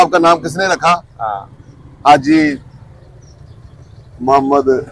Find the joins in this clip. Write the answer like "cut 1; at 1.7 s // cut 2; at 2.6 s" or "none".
none